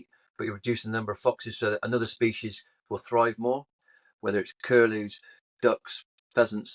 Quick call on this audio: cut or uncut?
uncut